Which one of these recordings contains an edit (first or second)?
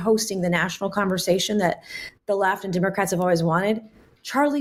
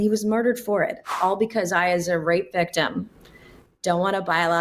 second